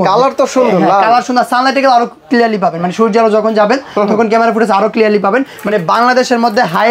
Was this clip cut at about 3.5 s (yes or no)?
no